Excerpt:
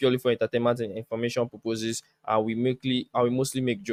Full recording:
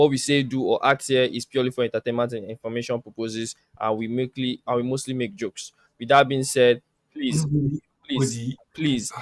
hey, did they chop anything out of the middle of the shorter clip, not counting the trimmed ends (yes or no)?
no